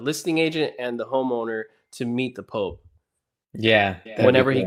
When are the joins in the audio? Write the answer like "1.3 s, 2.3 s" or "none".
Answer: none

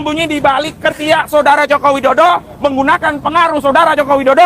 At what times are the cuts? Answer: 2.6 s

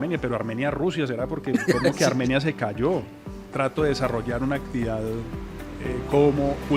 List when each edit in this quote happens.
3.1 s

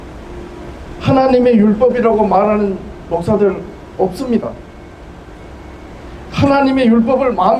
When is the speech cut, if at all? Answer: none

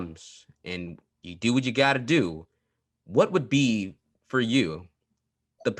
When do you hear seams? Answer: none

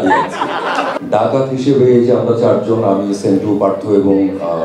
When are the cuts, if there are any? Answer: 0.9 s

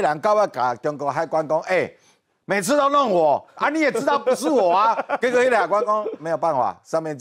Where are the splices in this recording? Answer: none

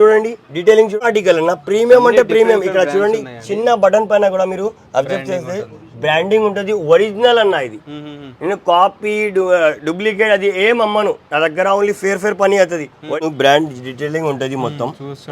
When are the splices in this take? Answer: 1.0 s, 13.2 s

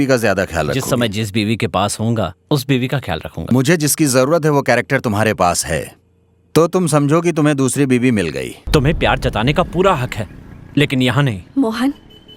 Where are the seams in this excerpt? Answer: 3.5 s, 8.5 s

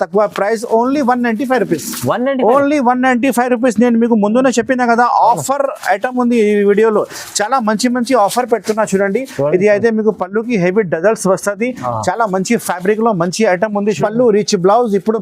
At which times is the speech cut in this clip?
13.9 s

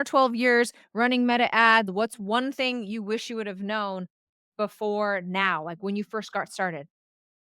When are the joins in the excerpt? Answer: 1.9 s

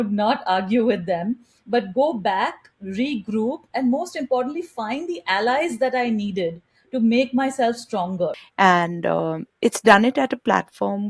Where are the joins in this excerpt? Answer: 8.4 s

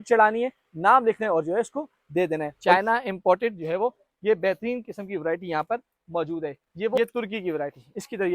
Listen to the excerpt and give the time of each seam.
2.6 s, 7.0 s

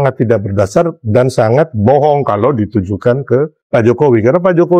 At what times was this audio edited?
3.6 s

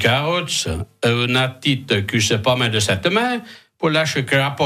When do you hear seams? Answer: none

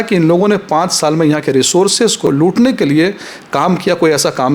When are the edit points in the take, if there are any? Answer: 2.3 s

